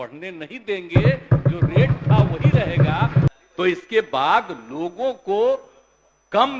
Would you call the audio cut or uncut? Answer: cut